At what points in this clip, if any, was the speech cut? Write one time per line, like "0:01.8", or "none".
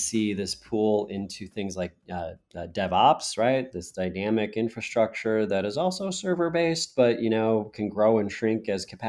none